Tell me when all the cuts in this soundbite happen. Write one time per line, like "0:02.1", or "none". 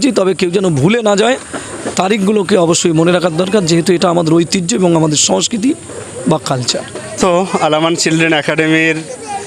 0:07.2